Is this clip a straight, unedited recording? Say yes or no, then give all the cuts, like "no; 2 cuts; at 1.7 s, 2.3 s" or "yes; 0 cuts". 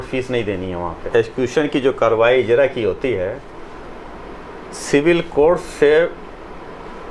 no; 1 cut; at 1.0 s